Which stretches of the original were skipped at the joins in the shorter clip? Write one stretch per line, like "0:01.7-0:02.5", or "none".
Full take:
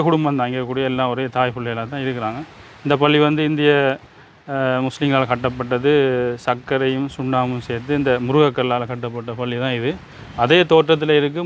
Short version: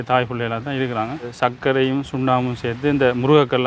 0:02.6-0:06.4